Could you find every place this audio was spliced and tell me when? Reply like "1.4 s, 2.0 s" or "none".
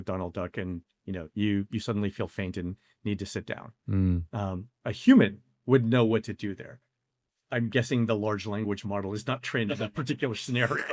none